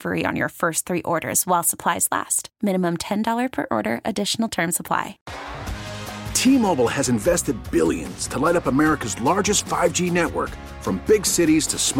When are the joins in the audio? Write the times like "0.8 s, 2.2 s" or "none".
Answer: 5.2 s